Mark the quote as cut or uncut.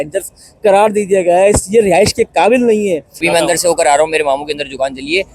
cut